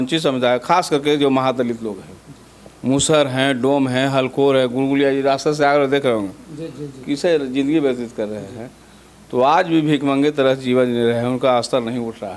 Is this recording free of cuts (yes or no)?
yes